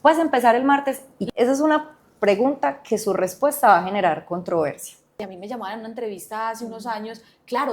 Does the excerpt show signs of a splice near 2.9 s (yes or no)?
no